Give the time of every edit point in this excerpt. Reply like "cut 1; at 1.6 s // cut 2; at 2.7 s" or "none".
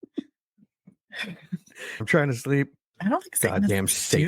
cut 1; at 2.0 s

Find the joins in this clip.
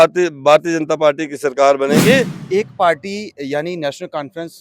cut 1; at 2.4 s

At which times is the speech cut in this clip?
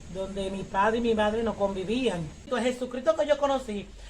cut 1; at 2.4 s

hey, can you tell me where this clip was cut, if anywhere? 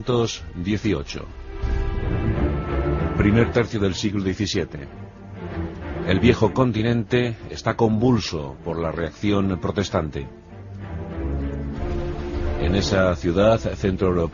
cut 1; at 10.1 s

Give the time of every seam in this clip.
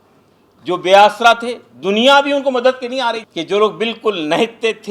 cut 1; at 3.3 s

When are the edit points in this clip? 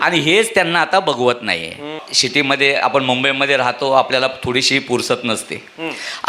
cut 1; at 2.1 s

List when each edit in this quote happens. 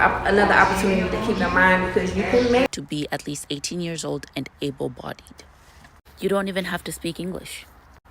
cut 1; at 2.7 s

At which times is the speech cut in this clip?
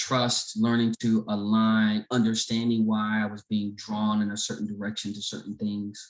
none

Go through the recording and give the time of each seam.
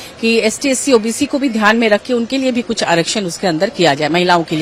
none

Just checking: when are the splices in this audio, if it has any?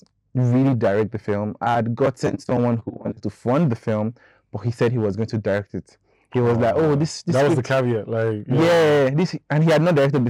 none

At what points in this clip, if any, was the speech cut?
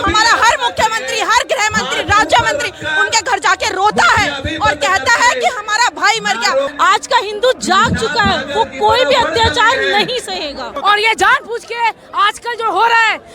cut 1; at 6.7 s // cut 2; at 10.7 s

